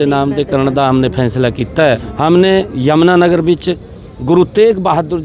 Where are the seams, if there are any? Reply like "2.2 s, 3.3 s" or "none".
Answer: 2.1 s

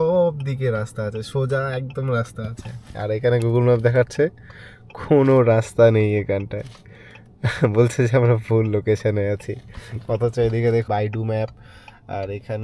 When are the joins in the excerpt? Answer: 10.8 s

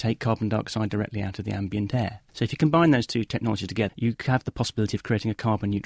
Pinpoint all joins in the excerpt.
3.9 s

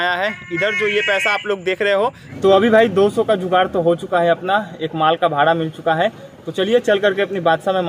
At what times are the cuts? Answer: 2.3 s

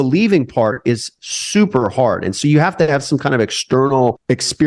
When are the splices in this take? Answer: none

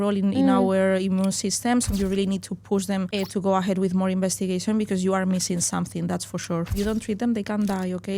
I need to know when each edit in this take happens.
1.9 s, 3.1 s, 6.7 s

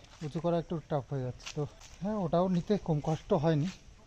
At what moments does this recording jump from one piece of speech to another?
2.1 s

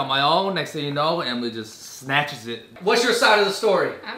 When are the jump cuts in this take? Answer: 2.7 s

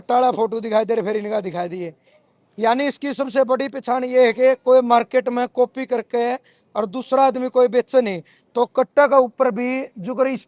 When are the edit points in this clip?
none

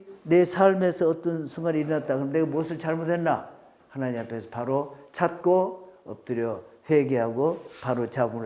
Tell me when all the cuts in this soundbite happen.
none

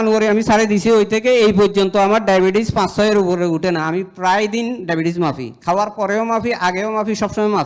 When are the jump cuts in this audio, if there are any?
none

